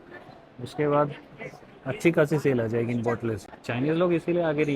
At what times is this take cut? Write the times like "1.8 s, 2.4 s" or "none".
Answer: 3.5 s